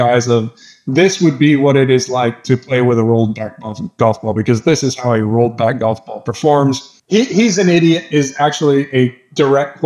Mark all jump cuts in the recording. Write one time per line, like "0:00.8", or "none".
0:06.9